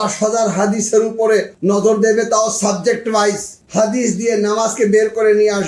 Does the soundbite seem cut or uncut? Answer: uncut